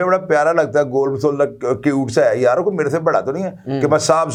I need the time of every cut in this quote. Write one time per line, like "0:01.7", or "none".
none